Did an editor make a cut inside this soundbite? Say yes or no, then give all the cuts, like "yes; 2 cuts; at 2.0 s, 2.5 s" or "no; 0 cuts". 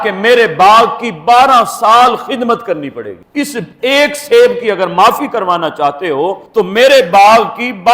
no; 0 cuts